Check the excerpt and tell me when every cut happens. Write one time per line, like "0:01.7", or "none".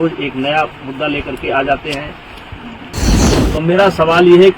0:03.2